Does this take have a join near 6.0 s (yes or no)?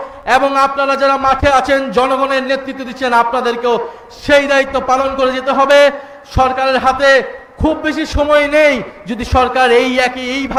no